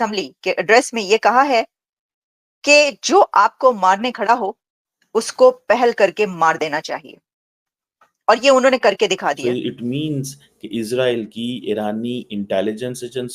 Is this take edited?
yes; 1 cut; at 9.4 s

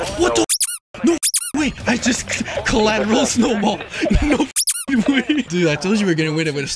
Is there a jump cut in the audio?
yes; 2 cuts; at 1.8 s, 5.5 s

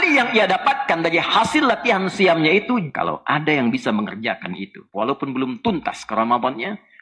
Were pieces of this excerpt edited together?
yes; 1 cut; at 2.9 s

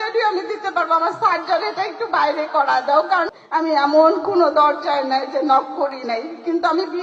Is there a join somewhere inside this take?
yes; 1 cut; at 3.3 s

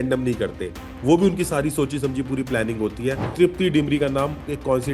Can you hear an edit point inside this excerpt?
yes; 1 cut; at 3.3 s

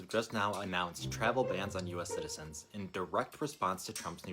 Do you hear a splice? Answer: no; 0 cuts

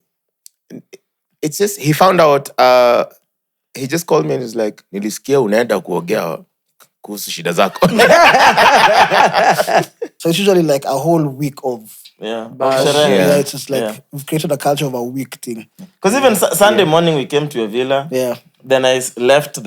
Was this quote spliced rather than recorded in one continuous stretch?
yes; 1 cut; at 10.0 s

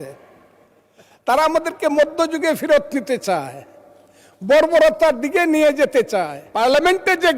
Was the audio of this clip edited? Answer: yes; 1 cut; at 6.4 s

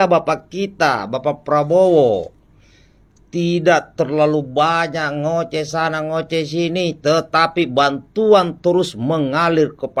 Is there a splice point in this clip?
no; 0 cuts

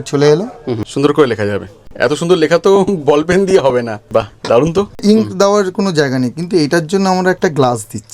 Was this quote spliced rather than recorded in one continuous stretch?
yes; 4 cuts; at 0.9 s, 1.9 s, 4.0 s, 5.0 s

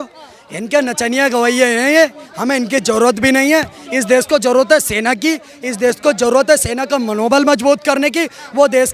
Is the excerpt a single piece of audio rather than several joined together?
yes; 0 cuts

